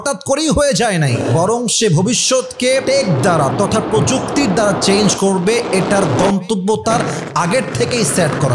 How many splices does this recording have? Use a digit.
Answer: 2